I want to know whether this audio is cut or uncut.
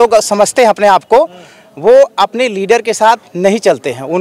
uncut